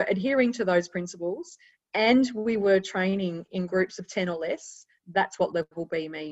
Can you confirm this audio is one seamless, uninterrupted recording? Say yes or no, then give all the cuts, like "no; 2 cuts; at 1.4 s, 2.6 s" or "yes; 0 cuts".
yes; 0 cuts